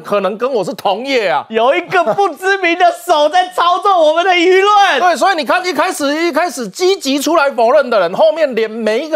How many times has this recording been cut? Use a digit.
0